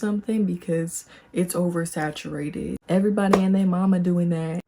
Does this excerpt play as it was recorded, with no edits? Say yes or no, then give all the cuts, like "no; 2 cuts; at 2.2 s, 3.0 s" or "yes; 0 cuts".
no; 1 cut; at 2.8 s